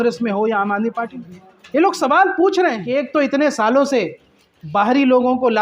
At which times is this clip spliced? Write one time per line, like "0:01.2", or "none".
0:02.8